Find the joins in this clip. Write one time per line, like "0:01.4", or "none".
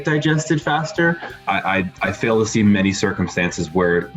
0:01.3